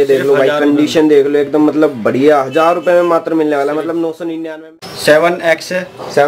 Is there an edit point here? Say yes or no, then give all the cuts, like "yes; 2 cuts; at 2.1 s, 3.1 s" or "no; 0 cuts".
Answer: yes; 1 cut; at 4.5 s